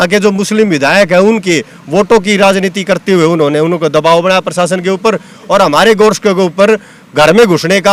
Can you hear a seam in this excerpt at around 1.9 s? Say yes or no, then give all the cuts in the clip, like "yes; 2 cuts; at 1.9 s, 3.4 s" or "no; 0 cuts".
no; 0 cuts